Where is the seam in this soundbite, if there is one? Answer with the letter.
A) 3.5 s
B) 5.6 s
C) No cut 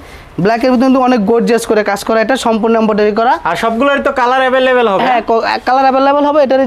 C